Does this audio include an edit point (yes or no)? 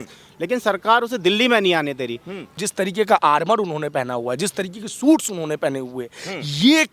yes